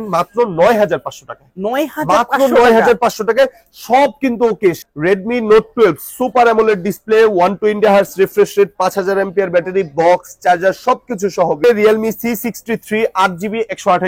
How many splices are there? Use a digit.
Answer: 2